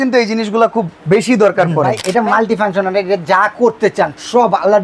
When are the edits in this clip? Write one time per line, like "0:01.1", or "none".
0:02.0